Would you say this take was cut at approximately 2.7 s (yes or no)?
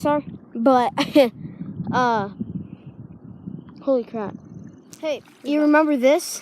no